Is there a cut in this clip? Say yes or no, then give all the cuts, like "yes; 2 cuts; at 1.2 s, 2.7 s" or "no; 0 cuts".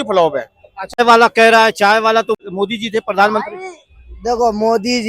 yes; 2 cuts; at 1.0 s, 2.4 s